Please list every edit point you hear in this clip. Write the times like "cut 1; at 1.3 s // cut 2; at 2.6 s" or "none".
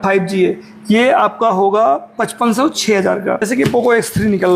cut 1; at 3.4 s